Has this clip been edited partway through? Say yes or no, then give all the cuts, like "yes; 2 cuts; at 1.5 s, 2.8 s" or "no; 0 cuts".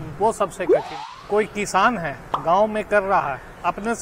yes; 1 cut; at 0.9 s